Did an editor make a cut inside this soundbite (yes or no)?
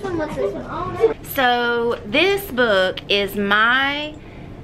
yes